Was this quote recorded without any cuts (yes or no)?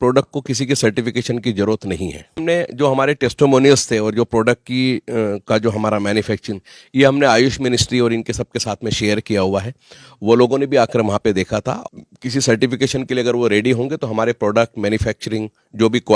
no